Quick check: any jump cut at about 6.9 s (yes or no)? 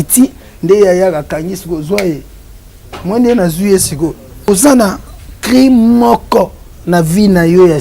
no